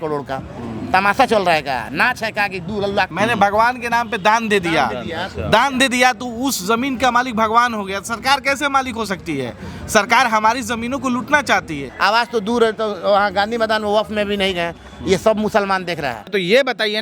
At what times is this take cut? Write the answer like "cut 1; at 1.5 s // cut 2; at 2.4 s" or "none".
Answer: cut 1; at 3.1 s // cut 2; at 11.8 s // cut 3; at 16.3 s